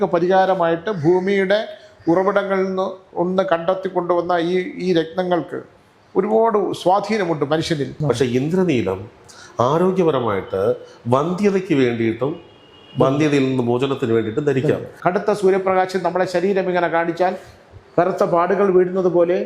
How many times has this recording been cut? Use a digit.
2